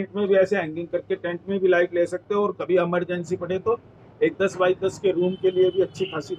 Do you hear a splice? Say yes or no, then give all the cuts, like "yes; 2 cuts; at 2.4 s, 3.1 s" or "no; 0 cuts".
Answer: no; 0 cuts